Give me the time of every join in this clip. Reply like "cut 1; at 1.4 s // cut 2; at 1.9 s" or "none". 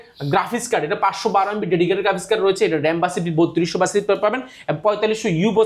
none